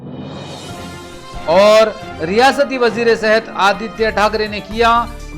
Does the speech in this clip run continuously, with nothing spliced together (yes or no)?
yes